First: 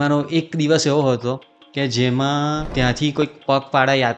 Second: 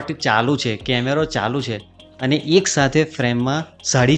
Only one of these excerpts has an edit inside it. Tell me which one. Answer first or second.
first